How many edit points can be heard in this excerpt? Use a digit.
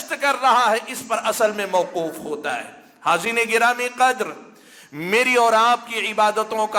0